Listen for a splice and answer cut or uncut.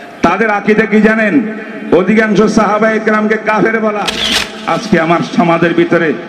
cut